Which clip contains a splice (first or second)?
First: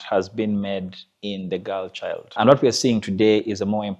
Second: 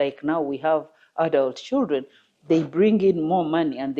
first